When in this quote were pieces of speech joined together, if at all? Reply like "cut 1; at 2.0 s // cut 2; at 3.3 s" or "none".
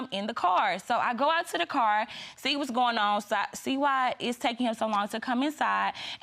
none